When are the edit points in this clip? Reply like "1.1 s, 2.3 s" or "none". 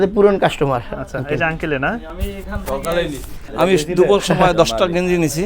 none